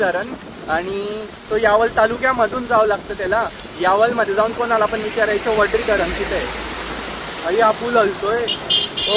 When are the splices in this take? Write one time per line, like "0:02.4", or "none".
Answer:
none